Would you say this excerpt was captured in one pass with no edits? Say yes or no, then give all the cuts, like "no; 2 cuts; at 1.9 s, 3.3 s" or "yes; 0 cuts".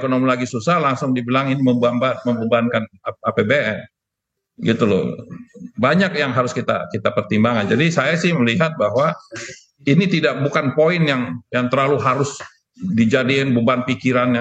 yes; 0 cuts